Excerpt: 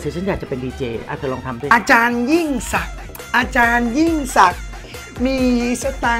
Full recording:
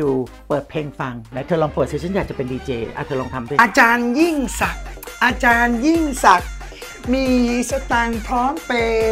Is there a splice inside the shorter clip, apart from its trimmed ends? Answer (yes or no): no